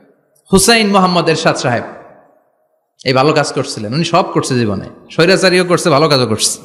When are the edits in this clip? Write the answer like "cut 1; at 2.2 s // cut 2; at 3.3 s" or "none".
none